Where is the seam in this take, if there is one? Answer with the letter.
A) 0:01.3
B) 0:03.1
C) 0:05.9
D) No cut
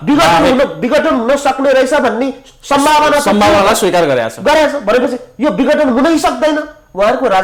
D